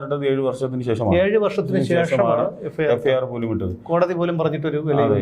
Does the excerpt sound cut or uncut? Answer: uncut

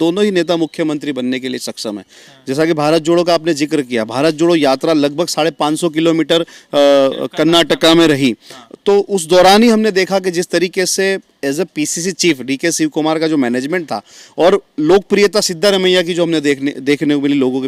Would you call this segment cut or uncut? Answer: uncut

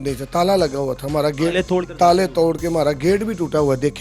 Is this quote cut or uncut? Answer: cut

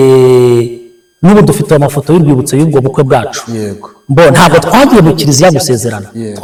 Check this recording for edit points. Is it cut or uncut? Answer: uncut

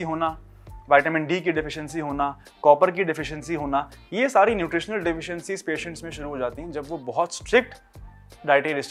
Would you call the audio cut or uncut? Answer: uncut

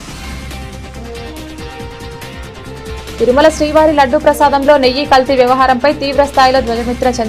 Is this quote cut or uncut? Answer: uncut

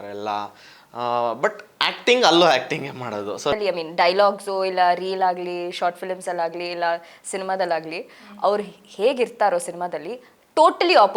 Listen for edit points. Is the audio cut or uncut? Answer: cut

